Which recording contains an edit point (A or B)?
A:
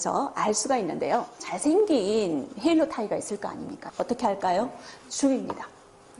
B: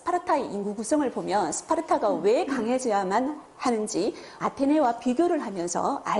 A